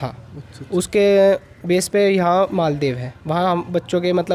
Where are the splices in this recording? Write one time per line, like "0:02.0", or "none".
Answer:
none